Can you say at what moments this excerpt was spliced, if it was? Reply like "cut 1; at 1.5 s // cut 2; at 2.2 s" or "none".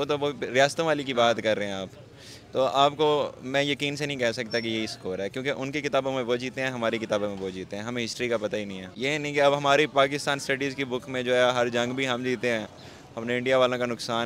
cut 1; at 8.8 s